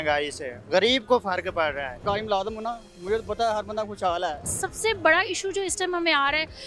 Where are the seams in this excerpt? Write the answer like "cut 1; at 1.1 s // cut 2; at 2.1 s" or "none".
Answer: cut 1; at 2.0 s // cut 2; at 4.6 s